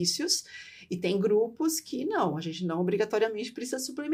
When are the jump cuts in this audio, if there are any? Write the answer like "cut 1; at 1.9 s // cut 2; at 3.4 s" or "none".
none